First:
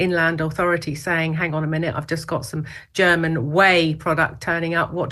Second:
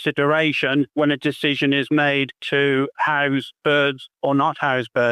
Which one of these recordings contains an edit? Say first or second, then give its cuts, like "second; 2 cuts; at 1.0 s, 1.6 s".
second; 3 cuts; at 0.9 s, 2.4 s, 4.1 s